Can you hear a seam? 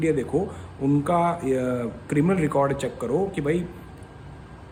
no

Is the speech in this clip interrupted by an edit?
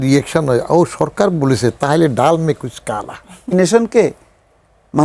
yes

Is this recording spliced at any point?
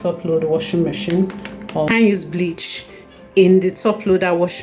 yes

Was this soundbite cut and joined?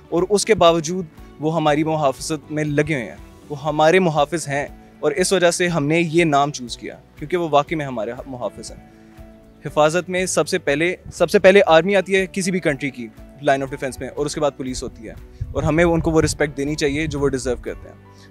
no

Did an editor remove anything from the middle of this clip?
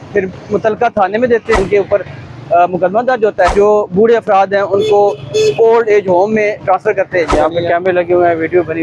yes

